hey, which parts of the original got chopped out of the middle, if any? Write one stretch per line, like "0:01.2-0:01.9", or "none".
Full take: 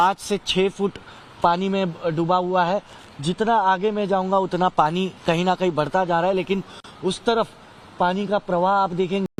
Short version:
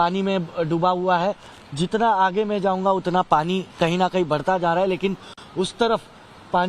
none